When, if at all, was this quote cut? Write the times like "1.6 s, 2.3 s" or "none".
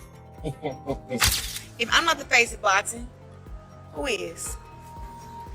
1.2 s